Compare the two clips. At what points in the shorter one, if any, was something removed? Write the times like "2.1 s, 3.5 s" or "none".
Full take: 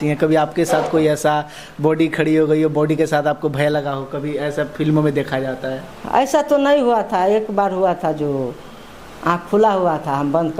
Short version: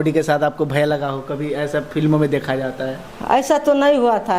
none

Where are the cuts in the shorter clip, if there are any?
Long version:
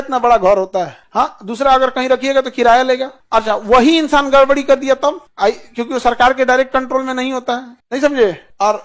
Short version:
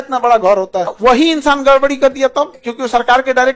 0.9 s, 2.6 s

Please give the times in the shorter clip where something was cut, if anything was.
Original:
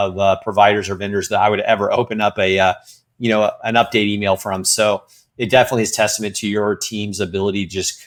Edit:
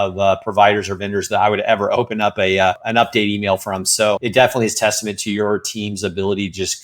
2.8 s, 4.2 s

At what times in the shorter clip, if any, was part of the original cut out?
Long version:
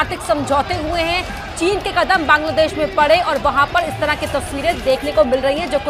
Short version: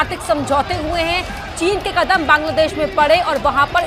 none

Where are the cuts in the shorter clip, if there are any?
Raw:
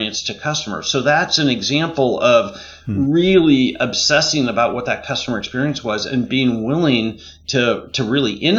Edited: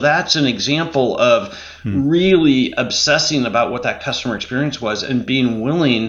none

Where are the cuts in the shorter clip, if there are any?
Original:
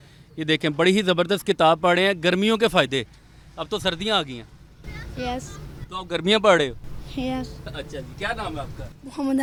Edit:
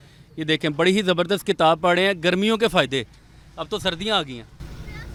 none

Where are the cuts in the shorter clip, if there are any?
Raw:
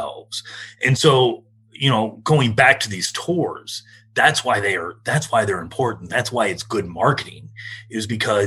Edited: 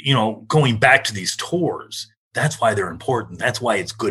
2.2 s

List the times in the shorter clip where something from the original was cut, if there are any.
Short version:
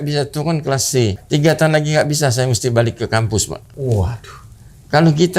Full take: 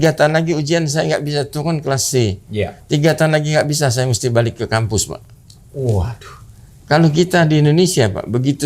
1.2 s, 3.7 s

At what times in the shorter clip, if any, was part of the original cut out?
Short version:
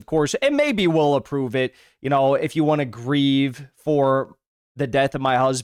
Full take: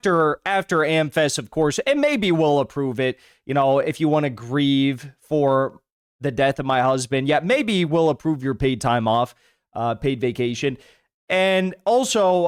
none

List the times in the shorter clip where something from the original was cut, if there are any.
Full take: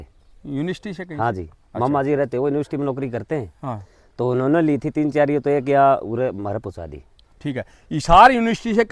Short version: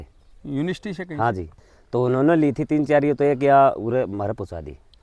1.6 s

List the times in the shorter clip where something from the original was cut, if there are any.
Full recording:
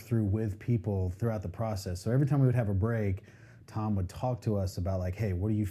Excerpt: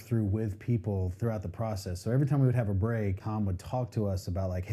3.2 s

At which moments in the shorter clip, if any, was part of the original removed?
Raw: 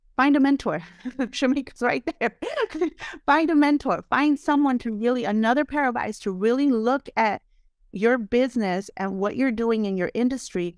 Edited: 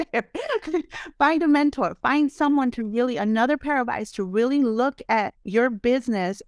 5.4 s

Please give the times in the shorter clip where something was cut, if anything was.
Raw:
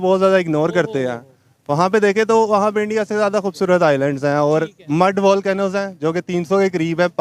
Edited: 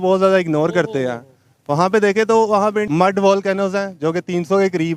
2.9 s

